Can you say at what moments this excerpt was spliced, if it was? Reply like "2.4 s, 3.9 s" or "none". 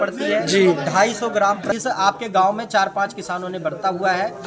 1.7 s